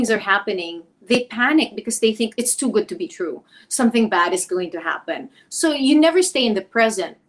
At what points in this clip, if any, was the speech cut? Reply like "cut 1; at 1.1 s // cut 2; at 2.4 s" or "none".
cut 1; at 2.3 s